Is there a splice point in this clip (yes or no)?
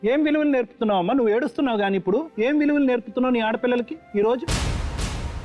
yes